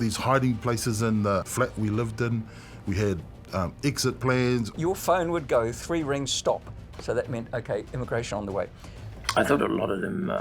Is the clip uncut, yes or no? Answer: no